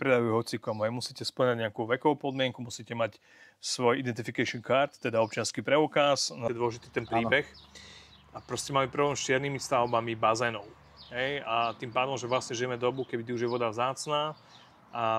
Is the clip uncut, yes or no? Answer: no